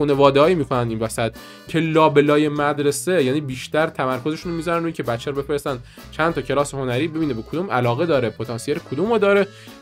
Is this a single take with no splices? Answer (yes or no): yes